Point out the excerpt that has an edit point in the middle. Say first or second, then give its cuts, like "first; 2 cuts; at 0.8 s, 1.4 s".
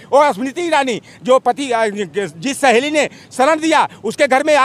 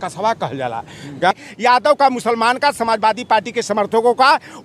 second; 1 cut; at 1.3 s